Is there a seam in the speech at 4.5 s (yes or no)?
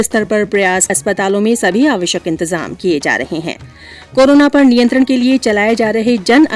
no